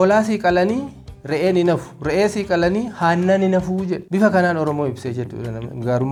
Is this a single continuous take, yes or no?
yes